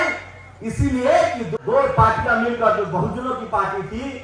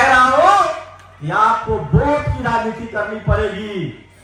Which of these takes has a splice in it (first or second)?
first